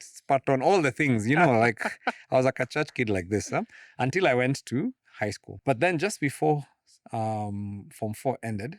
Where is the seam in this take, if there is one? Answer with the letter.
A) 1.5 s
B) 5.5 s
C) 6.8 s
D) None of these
B